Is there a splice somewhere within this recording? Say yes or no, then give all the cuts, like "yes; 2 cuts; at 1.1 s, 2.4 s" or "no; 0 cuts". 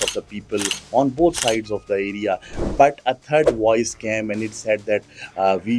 no; 0 cuts